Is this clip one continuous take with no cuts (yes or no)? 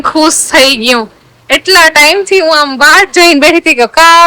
yes